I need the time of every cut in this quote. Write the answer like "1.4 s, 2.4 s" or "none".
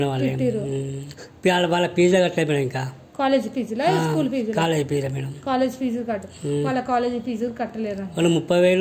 none